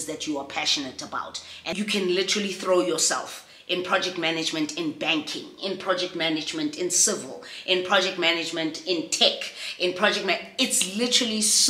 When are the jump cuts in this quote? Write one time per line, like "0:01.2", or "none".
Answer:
0:01.7